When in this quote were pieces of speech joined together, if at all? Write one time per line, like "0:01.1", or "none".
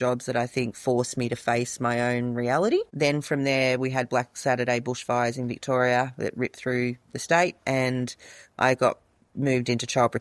none